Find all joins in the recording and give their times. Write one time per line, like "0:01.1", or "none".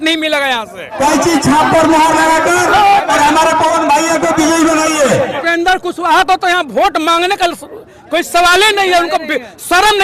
0:01.0
0:05.4